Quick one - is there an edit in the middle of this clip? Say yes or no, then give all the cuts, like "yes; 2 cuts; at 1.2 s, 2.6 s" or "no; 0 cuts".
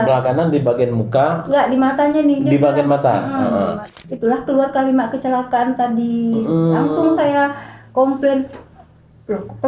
yes; 1 cut; at 3.9 s